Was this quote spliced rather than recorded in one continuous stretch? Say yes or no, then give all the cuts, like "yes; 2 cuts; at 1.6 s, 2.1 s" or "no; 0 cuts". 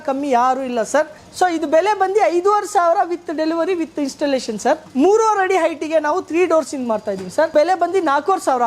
yes; 3 cuts; at 1.2 s, 4.9 s, 7.5 s